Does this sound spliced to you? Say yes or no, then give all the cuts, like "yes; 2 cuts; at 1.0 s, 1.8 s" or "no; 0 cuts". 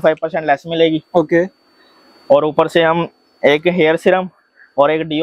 no; 0 cuts